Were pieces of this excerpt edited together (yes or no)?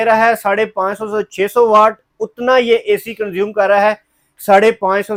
no